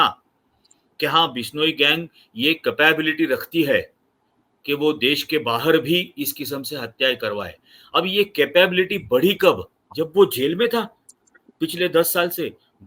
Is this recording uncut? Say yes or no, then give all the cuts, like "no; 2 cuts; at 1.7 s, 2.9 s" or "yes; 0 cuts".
yes; 0 cuts